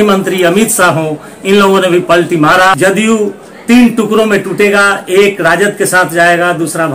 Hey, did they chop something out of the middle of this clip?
yes; 1 cut; at 2.7 s

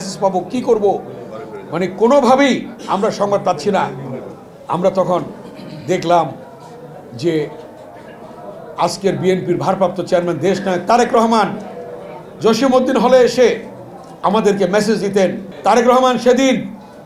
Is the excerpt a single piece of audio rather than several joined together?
no; 1 cut; at 15.4 s

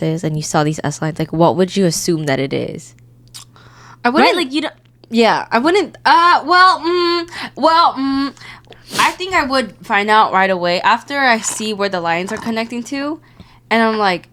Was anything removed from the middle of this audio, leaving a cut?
no; 0 cuts

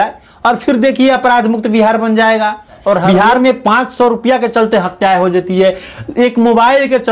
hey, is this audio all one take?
no; 1 cut; at 3.0 s

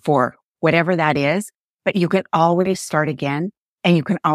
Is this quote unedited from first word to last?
yes; 0 cuts

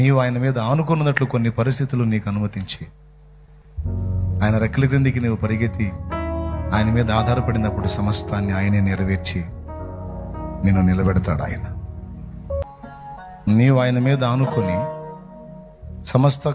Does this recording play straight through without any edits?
no; 1 cut; at 12.6 s

